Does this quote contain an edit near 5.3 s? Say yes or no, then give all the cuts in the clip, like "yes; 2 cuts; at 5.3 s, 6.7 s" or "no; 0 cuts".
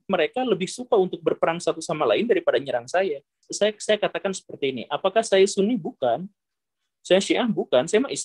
no; 1 cut; at 3.4 s